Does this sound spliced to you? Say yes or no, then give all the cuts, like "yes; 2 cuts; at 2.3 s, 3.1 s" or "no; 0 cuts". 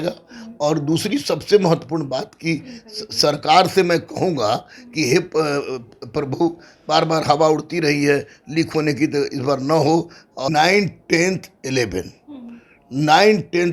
yes; 1 cut; at 10.5 s